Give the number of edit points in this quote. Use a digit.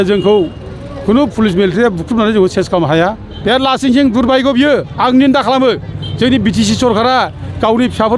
1